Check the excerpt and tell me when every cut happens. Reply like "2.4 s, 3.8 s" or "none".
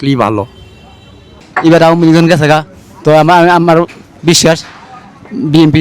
1.4 s